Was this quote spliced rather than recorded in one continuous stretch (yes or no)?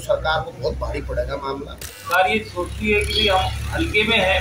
yes